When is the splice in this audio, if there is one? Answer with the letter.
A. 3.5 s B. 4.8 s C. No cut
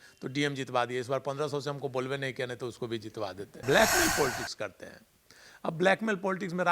A